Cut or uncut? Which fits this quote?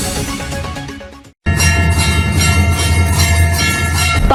uncut